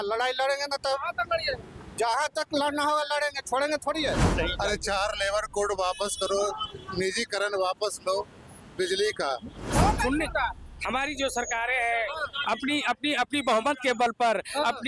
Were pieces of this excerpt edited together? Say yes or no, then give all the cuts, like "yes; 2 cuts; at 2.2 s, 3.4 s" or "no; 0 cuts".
yes; 2 cuts; at 4.3 s, 9.7 s